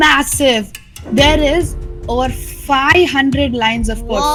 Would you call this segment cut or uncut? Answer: uncut